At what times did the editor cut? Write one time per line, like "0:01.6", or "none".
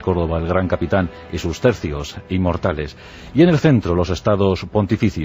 0:02.9